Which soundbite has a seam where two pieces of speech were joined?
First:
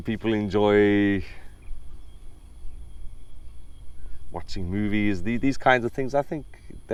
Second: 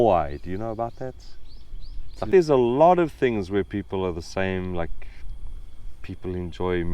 second; 1 cut; at 2.3 s

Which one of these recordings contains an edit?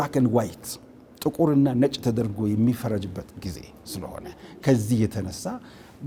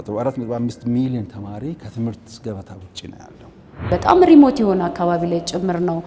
second; 1 cut; at 3.9 s

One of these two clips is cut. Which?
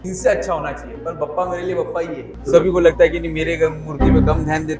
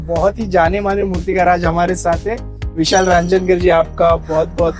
first; 1 cut; at 2.4 s

